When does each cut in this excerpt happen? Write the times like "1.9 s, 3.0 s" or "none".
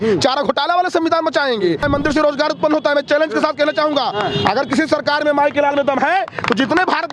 1.8 s